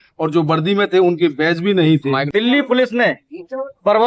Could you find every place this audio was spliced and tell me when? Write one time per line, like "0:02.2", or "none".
0:02.3